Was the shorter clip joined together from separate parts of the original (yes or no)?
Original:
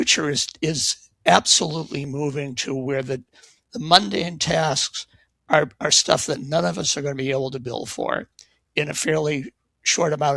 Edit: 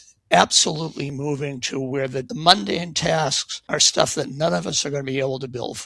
yes